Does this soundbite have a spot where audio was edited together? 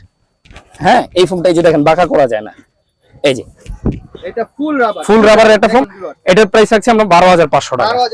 no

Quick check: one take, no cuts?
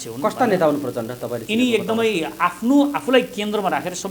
yes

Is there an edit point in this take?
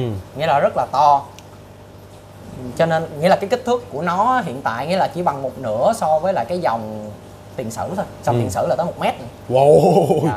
no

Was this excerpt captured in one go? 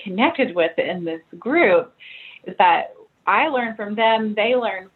yes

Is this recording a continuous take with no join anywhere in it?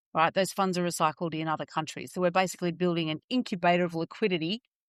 yes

